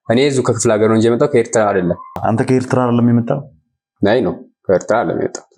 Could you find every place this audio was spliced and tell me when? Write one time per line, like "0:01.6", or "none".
0:02.1